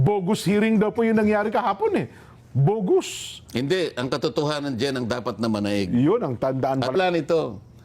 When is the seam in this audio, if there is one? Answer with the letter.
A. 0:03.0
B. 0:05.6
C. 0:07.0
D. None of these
C